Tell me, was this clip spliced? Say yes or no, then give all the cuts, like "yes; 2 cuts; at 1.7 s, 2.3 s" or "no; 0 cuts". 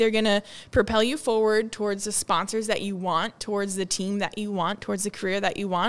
no; 0 cuts